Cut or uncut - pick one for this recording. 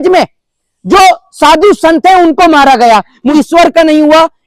cut